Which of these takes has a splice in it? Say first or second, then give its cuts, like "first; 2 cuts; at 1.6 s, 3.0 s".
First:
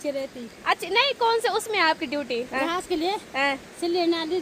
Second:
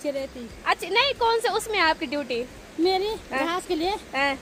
first; 1 cut; at 2.5 s